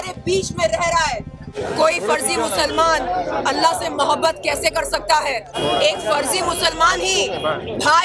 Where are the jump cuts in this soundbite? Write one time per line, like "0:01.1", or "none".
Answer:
0:01.5
0:05.5